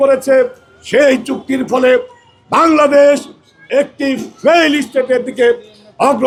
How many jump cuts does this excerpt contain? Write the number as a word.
zero